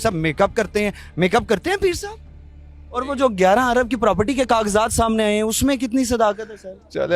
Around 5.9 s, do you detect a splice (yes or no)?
no